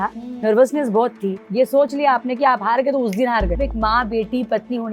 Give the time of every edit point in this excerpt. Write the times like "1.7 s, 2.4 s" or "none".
1.4 s, 3.6 s